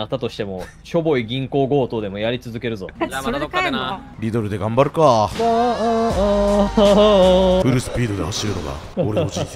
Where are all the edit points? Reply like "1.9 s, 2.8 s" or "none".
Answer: 2.9 s, 4.1 s, 7.6 s